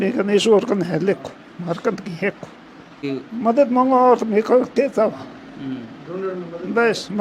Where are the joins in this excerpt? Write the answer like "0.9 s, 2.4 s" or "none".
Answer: 3.0 s